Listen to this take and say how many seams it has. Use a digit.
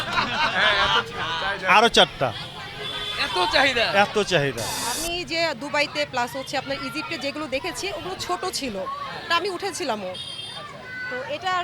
1